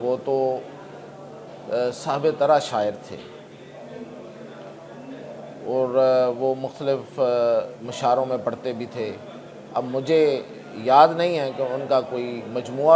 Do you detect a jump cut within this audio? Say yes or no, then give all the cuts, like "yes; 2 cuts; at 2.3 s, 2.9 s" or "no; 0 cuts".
no; 0 cuts